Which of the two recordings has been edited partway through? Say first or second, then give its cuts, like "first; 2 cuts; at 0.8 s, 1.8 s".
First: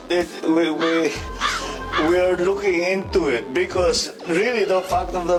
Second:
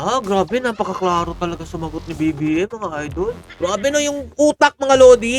second; 1 cut; at 3.5 s